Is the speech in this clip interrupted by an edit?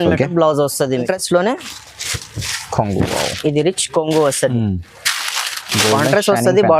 yes; 1 cut; at 1.0 s

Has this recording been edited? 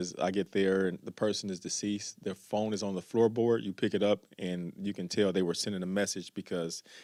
no; 0 cuts

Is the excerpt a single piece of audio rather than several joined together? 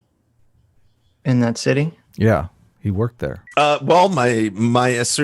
no; 1 cut; at 3.4 s

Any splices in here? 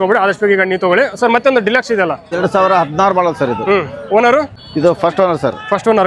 yes; 2 cuts; at 2.3 s, 4.6 s

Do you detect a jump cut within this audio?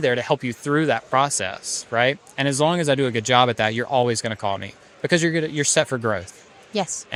no; 0 cuts

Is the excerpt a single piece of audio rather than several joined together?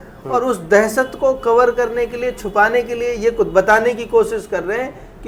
yes; 0 cuts

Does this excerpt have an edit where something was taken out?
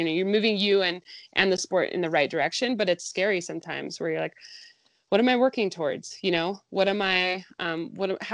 no; 0 cuts

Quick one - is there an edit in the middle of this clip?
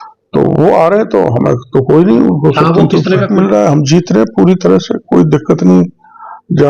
yes; 1 cut; at 3.3 s

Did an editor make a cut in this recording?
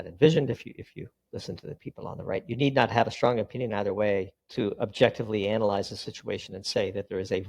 yes; 2 cuts; at 1.2 s, 4.4 s

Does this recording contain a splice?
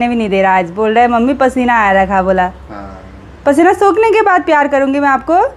no; 0 cuts

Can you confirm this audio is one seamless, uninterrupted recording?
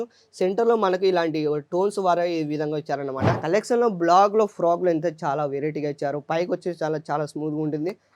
no; 1 cut; at 3.4 s

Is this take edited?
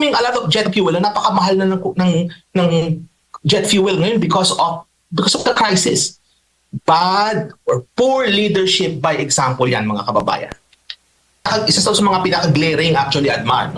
yes; 1 cut; at 11.5 s

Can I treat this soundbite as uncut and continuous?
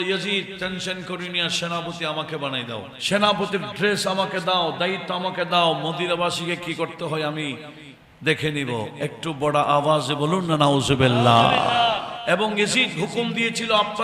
no; 2 cuts; at 2.9 s, 12.1 s

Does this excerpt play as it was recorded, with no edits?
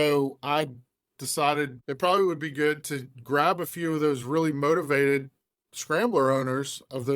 no; 1 cut; at 1.8 s

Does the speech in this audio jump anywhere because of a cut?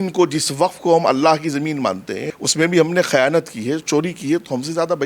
yes; 1 cut; at 2.2 s

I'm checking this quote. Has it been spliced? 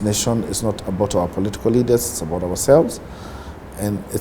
no; 0 cuts

